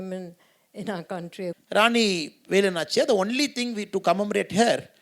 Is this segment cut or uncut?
cut